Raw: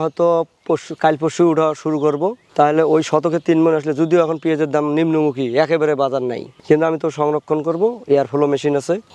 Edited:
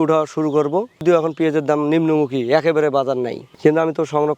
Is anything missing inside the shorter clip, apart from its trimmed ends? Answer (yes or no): yes